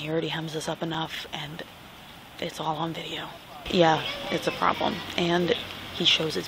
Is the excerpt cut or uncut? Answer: cut